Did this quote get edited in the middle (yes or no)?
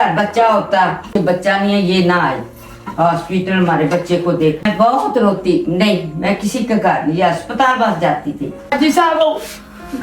yes